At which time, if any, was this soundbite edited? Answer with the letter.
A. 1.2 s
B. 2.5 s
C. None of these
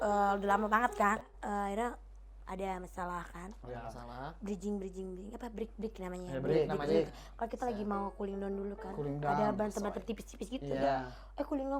A